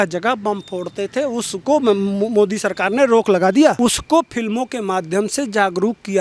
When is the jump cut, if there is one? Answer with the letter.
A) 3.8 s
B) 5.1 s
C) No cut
A